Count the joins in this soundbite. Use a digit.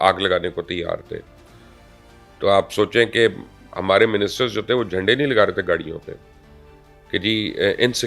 0